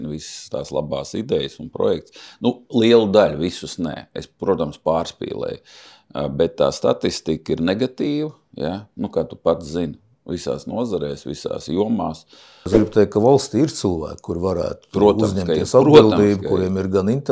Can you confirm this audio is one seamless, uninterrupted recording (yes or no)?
no